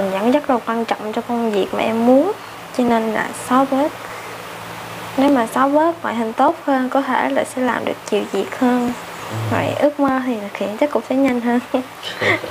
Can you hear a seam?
no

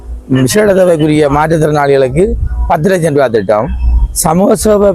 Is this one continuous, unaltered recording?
yes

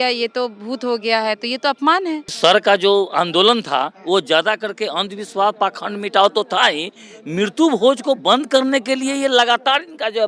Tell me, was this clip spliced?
yes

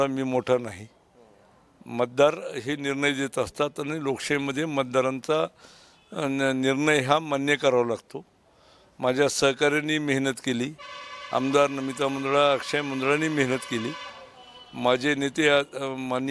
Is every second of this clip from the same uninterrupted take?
yes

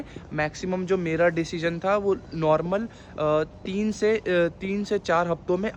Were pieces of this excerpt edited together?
no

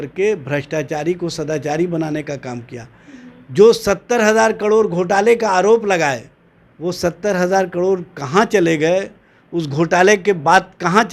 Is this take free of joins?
yes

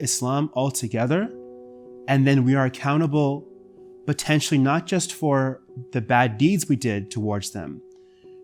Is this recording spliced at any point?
no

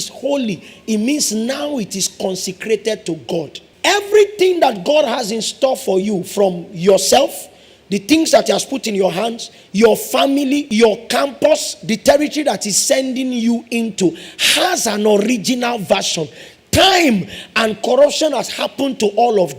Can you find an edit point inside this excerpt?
yes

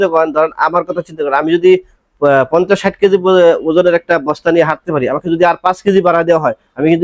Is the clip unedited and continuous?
yes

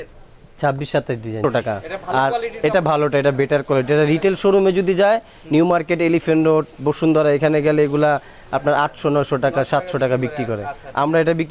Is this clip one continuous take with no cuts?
no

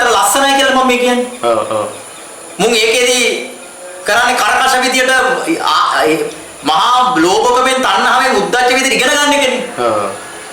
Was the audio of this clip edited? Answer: no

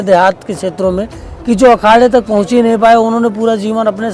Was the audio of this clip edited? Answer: no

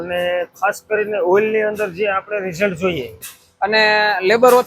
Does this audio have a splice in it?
yes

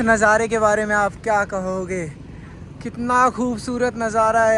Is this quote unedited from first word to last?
yes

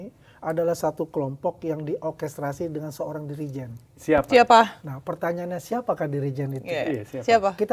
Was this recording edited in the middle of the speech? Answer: no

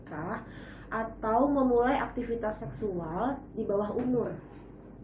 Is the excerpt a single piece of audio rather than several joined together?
yes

